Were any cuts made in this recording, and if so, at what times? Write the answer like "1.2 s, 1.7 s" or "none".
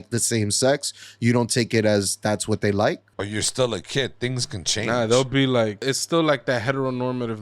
3.1 s, 5.8 s